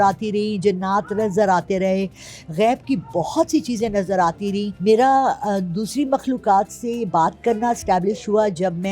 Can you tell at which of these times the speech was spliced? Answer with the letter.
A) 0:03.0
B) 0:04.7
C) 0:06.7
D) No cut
B